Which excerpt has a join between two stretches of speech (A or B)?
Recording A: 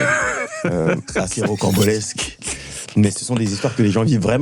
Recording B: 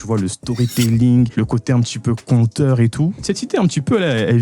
B